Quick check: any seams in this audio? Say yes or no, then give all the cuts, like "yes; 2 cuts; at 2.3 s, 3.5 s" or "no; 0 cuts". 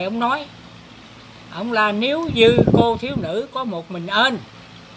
no; 0 cuts